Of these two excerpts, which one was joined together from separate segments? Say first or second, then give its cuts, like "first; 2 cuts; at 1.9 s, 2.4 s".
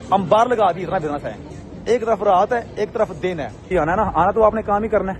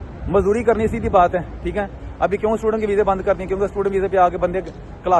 first; 1 cut; at 3.7 s